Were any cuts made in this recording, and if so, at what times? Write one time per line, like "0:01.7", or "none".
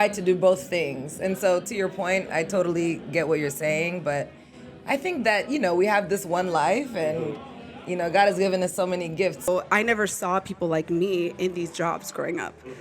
0:09.5